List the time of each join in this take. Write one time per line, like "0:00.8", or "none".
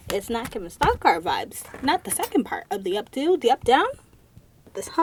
none